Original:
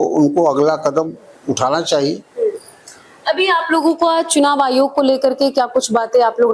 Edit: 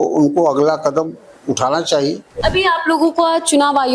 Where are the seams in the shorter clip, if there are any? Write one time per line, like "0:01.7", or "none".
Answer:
0:02.3